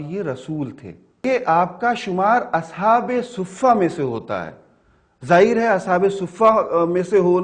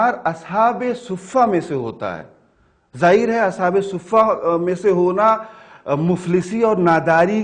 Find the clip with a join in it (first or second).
first